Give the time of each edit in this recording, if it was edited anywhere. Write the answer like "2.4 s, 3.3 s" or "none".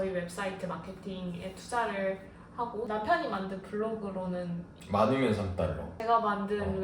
2.9 s

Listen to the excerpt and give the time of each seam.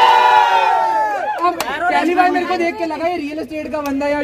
1.4 s

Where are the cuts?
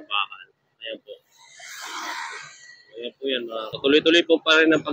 3.7 s

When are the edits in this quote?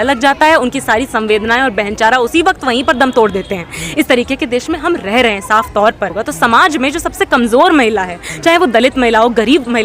6.2 s

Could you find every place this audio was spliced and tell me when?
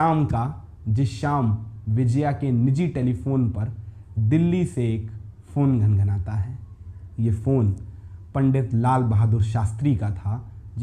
none

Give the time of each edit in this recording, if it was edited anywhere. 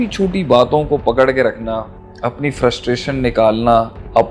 1.9 s

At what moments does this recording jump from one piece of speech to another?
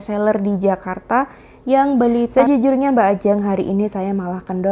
2.3 s

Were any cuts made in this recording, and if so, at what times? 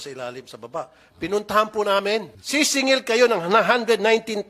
2.4 s

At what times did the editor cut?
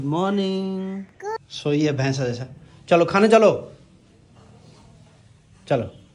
1.4 s

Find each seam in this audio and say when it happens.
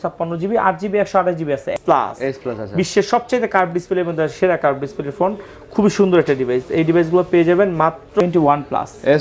1.8 s, 8.2 s

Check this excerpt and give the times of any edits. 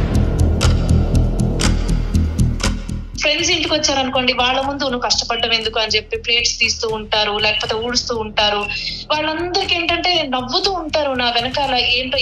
3.1 s

